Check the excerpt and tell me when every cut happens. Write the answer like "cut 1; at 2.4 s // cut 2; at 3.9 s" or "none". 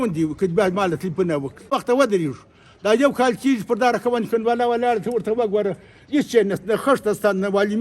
cut 1; at 1.7 s